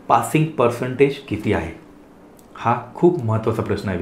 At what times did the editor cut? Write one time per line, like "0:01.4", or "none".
none